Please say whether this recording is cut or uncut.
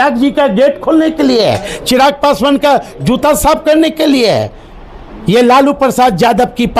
uncut